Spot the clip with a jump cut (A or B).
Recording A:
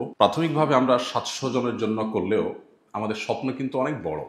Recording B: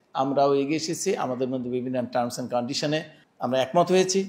B